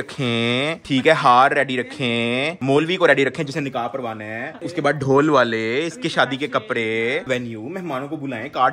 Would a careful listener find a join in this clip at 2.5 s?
no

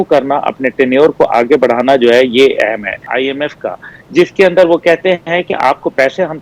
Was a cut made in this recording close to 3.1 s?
yes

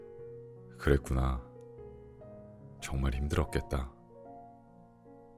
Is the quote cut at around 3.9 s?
yes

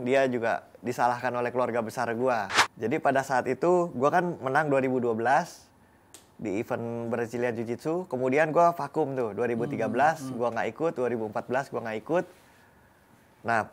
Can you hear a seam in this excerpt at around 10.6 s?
no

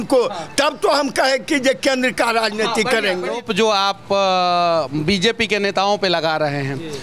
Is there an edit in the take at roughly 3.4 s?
yes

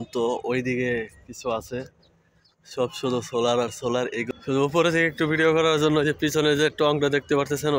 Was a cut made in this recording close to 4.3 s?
yes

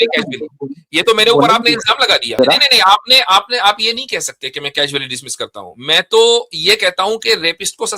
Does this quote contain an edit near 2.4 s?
yes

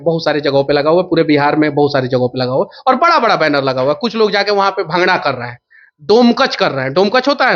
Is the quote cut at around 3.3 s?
no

